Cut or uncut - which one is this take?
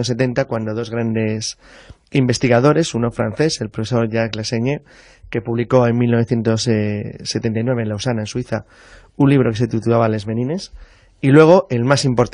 cut